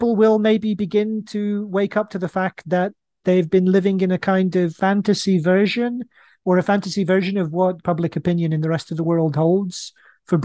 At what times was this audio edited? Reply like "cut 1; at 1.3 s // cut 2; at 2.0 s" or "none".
cut 1; at 4.7 s // cut 2; at 7.8 s